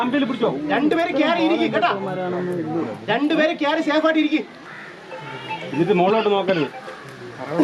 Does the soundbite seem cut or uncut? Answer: uncut